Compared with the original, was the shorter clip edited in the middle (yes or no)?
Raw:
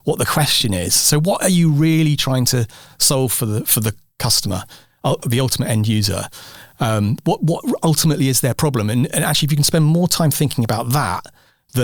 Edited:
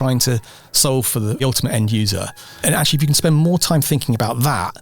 yes